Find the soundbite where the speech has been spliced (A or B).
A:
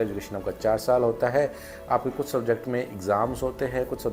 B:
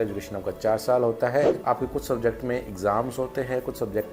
B